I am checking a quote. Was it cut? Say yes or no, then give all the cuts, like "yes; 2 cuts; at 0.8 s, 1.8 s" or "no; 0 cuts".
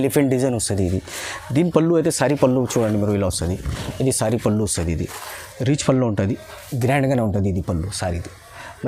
no; 0 cuts